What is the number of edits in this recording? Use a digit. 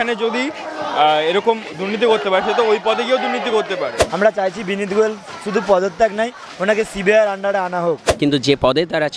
2